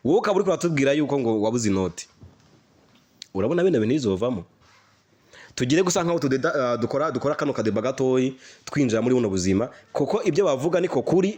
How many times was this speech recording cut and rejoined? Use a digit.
0